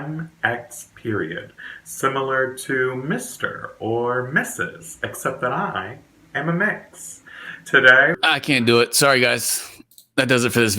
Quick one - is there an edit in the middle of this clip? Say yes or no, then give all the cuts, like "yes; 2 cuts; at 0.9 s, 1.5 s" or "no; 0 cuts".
yes; 1 cut; at 8.2 s